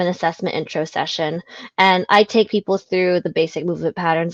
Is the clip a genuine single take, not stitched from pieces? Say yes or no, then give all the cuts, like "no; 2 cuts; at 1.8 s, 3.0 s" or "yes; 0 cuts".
yes; 0 cuts